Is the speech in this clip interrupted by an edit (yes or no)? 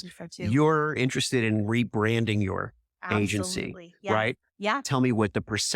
yes